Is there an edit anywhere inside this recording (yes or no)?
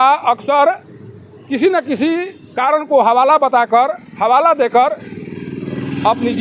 no